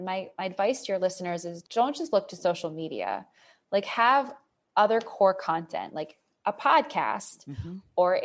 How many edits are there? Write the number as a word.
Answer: one